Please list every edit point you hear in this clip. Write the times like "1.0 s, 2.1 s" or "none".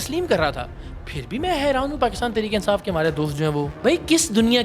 3.7 s